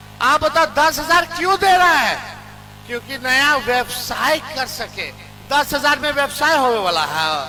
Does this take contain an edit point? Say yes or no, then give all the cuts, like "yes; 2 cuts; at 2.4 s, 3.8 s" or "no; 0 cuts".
no; 0 cuts